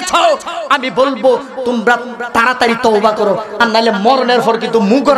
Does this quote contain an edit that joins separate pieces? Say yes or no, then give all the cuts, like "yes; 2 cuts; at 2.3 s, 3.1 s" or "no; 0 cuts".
no; 0 cuts